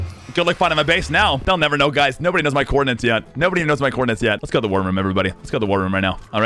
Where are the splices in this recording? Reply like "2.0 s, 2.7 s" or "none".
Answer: 4.4 s